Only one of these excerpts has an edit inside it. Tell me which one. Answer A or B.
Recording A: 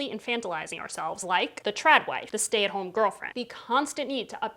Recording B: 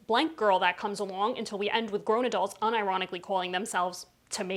A